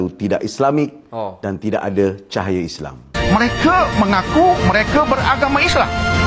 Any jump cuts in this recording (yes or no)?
yes